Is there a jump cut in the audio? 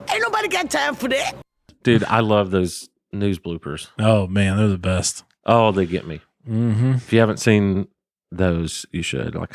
no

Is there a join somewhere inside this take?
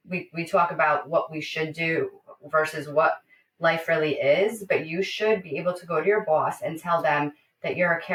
no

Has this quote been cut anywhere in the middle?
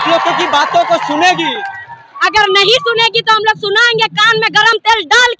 no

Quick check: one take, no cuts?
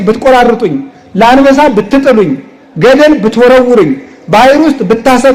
yes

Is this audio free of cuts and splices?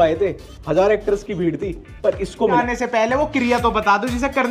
no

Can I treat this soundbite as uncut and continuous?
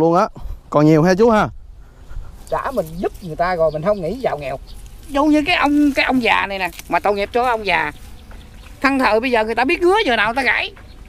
no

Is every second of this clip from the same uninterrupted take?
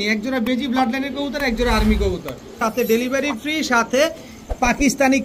no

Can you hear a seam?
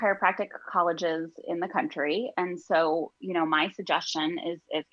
no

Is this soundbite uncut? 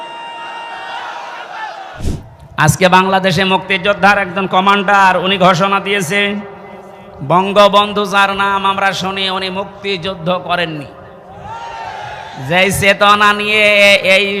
no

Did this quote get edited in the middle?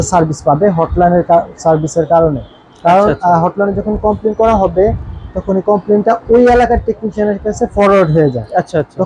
no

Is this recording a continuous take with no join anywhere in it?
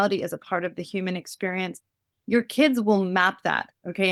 yes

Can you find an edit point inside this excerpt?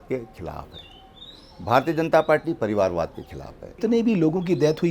yes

